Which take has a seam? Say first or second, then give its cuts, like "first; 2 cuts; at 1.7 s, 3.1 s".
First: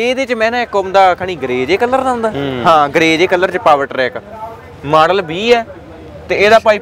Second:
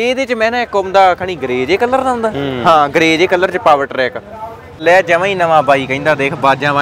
second; 1 cut; at 4.8 s